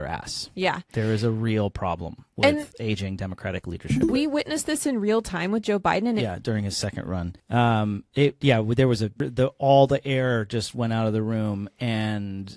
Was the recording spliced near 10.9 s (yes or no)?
no